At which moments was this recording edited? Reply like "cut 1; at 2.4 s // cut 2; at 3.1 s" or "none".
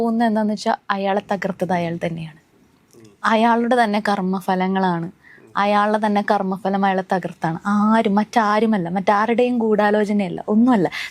none